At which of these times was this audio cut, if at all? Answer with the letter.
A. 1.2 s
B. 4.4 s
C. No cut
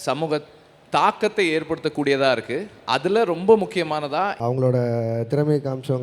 B